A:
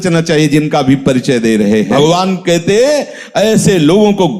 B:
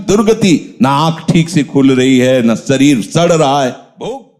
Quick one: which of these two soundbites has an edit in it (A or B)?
A